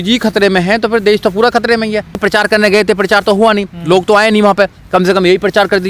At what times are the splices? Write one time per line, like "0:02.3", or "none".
0:02.2